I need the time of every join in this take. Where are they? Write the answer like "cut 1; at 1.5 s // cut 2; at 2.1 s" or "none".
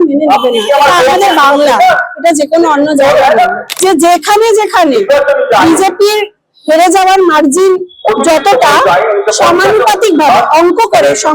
cut 1; at 3.6 s